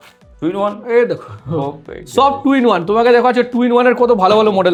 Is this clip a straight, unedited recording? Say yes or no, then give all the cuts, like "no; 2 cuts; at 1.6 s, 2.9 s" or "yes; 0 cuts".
yes; 0 cuts